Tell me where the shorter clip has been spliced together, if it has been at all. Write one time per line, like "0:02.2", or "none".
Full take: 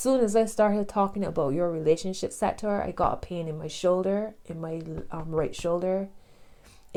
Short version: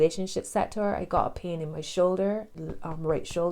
0:02.6